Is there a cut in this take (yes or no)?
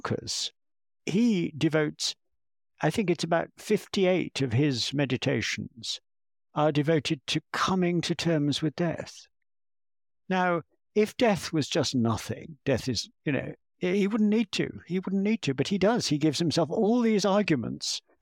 yes